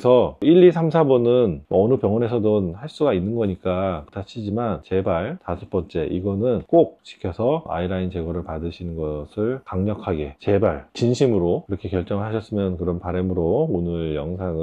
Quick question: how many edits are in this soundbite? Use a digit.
2